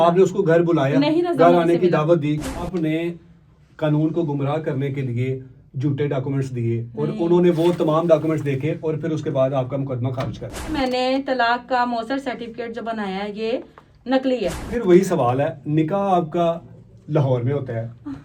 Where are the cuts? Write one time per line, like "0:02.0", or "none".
0:02.6
0:10.7
0:14.7